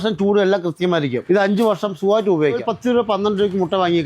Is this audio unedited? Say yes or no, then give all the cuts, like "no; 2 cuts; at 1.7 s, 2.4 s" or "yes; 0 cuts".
no; 2 cuts; at 1.2 s, 2.7 s